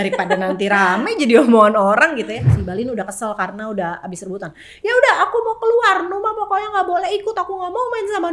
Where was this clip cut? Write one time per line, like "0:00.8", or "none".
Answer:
0:02.5